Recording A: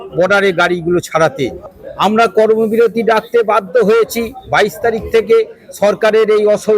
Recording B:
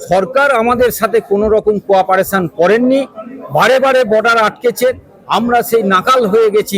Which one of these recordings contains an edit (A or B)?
A